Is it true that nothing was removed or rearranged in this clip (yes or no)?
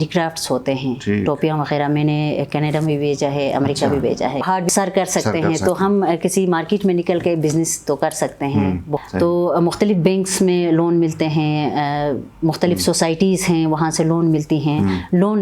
no